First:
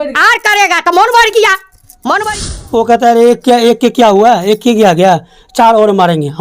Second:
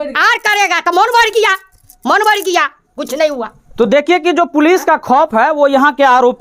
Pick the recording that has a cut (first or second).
first